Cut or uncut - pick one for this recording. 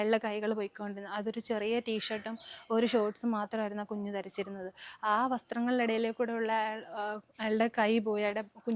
uncut